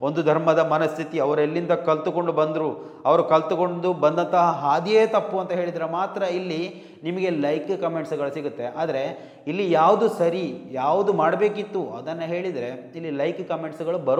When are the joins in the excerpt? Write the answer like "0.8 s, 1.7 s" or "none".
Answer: none